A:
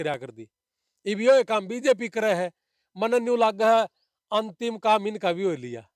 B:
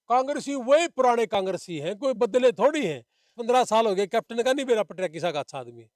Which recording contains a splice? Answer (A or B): B